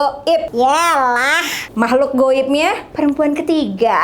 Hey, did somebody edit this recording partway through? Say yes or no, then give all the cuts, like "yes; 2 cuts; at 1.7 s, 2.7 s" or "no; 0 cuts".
yes; 1 cut; at 2.9 s